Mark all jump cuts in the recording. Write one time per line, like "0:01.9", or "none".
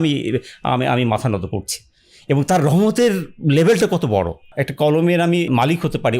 0:04.5
0:05.5